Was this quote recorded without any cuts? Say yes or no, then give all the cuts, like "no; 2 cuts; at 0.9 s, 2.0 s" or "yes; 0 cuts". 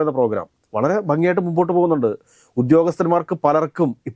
yes; 0 cuts